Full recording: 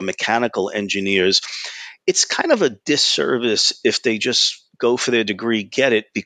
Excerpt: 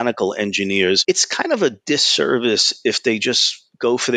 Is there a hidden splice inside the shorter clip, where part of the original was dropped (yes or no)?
yes